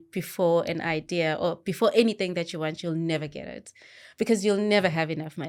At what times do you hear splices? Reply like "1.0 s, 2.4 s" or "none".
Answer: none